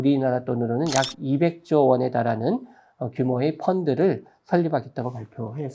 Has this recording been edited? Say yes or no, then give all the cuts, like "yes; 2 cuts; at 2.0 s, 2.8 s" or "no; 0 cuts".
no; 0 cuts